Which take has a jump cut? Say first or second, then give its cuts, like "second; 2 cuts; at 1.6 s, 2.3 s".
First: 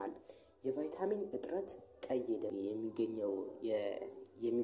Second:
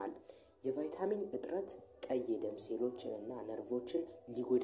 first; 1 cut; at 2.5 s